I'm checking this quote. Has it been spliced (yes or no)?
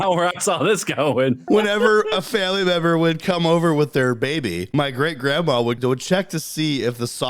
yes